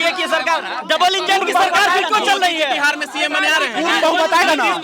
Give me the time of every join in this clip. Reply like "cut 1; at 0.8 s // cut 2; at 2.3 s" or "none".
none